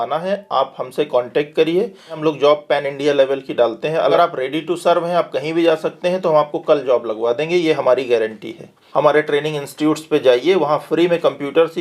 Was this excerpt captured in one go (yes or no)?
no